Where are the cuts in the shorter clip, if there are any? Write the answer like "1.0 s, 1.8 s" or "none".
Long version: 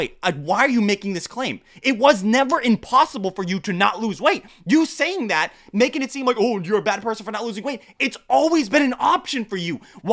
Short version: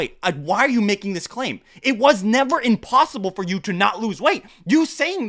none